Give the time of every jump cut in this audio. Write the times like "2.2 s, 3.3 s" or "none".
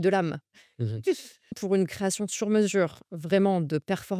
1.6 s